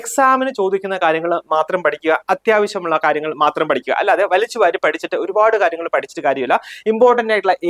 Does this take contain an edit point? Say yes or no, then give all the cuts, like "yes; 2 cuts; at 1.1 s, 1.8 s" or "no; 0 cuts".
no; 0 cuts